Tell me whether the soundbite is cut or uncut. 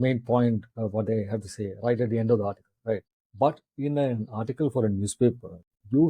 cut